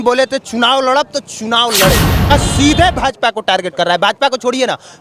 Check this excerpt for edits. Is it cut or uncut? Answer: cut